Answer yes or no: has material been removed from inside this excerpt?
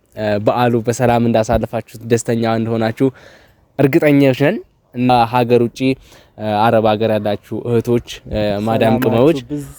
yes